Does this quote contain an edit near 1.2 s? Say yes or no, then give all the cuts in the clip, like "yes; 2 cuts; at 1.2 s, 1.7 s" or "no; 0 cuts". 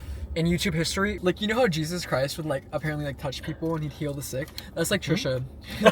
yes; 1 cut; at 1.2 s